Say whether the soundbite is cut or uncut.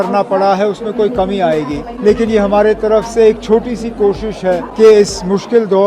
cut